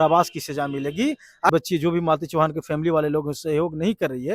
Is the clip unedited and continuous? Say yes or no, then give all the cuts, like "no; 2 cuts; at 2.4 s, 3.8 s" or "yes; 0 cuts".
no; 1 cut; at 1.5 s